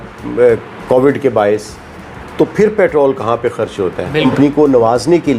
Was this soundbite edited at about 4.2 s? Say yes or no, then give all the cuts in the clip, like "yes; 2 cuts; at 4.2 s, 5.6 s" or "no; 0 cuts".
yes; 1 cut; at 4.2 s